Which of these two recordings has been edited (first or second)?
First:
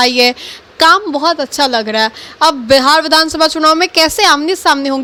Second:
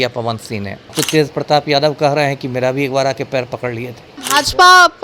second